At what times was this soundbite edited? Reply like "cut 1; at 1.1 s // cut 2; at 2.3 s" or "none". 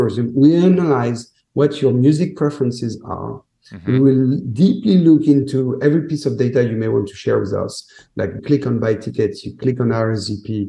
cut 1; at 8.4 s